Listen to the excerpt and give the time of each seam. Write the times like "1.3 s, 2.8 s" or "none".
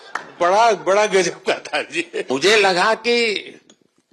2.3 s